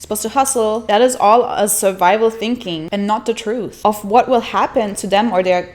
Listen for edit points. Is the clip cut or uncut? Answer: cut